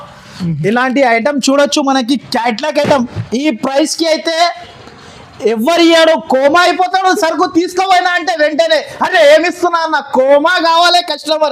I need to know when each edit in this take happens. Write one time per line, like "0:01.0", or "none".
none